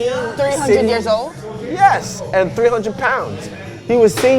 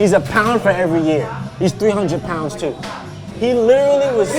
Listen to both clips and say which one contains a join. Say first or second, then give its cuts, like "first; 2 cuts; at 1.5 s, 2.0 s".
second; 1 cut; at 3.2 s